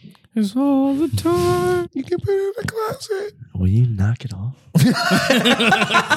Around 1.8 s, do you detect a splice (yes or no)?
yes